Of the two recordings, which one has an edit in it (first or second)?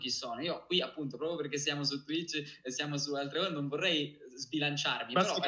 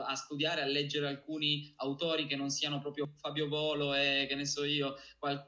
second